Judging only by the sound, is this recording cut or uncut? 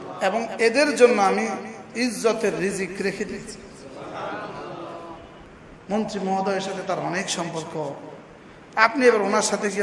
cut